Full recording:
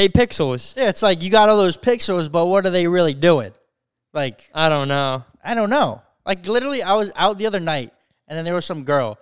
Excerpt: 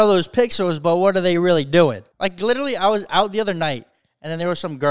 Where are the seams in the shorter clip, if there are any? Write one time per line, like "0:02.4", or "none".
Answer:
0:02.1